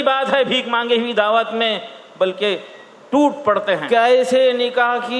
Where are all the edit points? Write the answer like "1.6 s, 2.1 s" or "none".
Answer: 3.8 s